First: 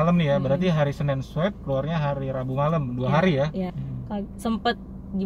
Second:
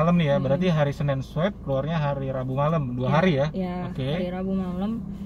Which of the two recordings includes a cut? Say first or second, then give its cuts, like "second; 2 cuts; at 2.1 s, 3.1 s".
first; 1 cut; at 3.7 s